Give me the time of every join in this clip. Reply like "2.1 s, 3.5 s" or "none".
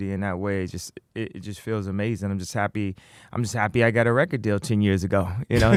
none

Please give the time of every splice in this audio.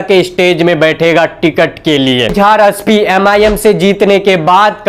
2.3 s

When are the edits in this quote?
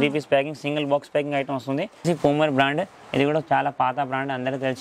2.0 s

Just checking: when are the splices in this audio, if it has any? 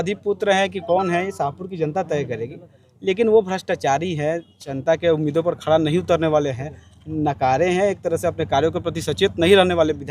none

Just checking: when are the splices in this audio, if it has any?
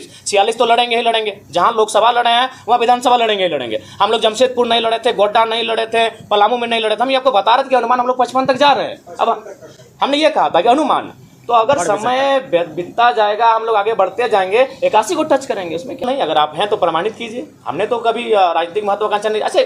16.0 s

